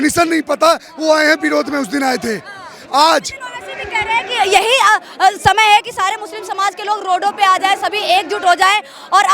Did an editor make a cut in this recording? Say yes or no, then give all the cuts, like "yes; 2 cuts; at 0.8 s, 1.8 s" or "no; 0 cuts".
no; 0 cuts